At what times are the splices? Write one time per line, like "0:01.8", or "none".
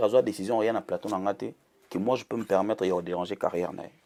none